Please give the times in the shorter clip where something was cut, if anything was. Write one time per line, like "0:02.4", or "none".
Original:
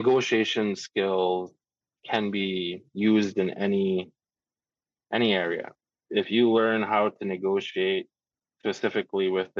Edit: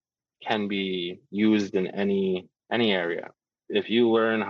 0:02.5